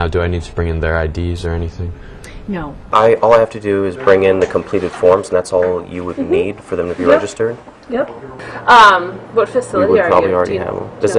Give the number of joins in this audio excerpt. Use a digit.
0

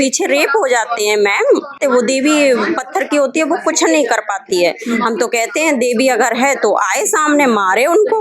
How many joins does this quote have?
1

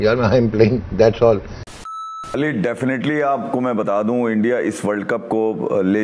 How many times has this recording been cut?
1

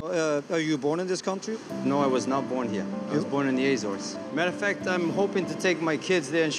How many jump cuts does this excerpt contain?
0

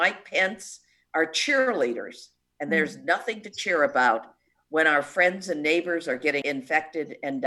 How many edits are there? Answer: 1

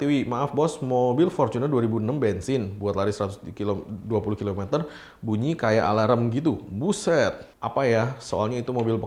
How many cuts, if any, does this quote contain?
0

